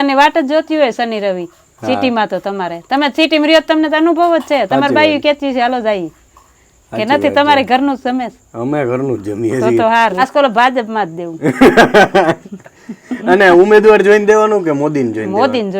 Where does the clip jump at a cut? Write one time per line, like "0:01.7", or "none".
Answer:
0:10.2